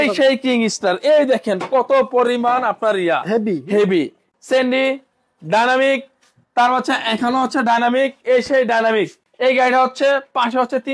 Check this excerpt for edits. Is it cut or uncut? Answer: cut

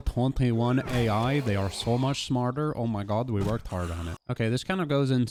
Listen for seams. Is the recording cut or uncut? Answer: uncut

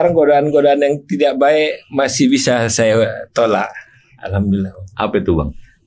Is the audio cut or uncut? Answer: uncut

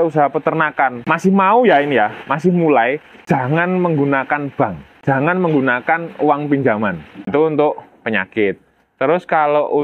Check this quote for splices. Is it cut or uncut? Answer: cut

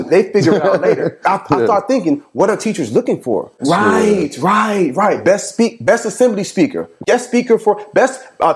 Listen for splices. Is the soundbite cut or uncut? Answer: cut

